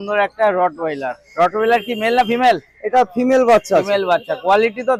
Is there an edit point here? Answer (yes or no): no